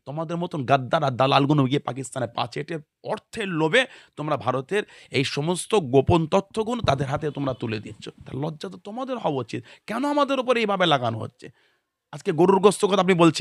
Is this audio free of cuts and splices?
yes; 0 cuts

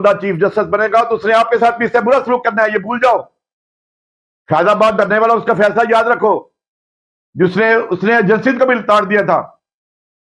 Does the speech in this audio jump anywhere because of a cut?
no; 0 cuts

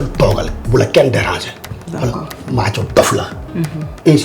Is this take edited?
no; 0 cuts

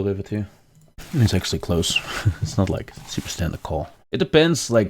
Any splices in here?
yes; 2 cuts; at 1.0 s, 4.0 s

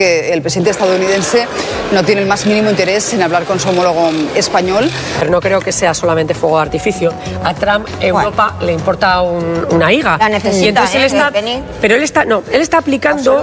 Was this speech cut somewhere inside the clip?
yes; 1 cut; at 5.2 s

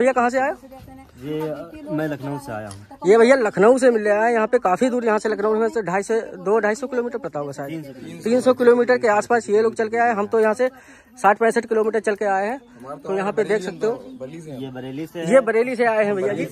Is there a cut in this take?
no; 0 cuts

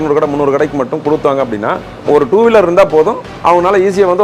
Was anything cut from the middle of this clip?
yes; 1 cut; at 2.0 s

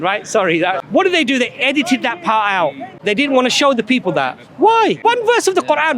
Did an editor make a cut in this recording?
yes; 3 cuts; at 0.8 s, 2.9 s, 5.0 s

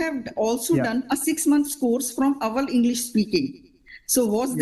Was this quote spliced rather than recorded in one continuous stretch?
no; 0 cuts

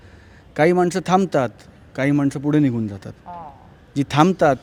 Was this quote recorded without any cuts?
yes; 0 cuts

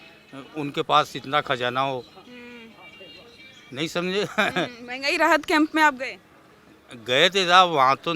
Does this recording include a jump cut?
no; 0 cuts

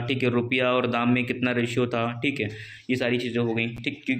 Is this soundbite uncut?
yes; 0 cuts

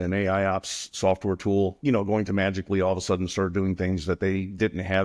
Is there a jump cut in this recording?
yes; 1 cut; at 1.8 s

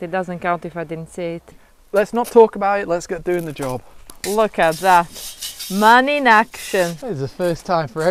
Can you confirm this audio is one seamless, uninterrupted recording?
no; 3 cuts; at 1.6 s, 4.1 s, 7.0 s

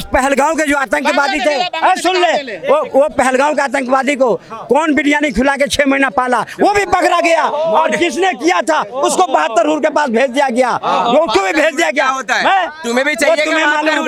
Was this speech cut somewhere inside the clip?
no; 0 cuts

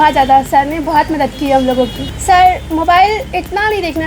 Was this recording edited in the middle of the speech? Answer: yes; 1 cut; at 2.1 s

